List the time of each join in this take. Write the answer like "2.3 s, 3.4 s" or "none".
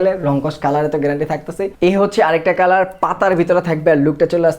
1.6 s